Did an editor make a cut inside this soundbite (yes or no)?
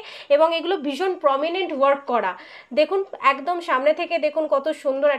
no